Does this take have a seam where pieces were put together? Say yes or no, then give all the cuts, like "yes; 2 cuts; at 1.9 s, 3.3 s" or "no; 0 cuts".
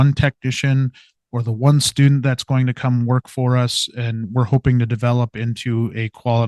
no; 0 cuts